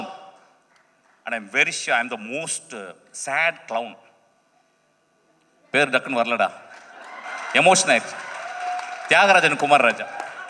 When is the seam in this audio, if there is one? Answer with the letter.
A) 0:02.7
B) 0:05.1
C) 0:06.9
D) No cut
B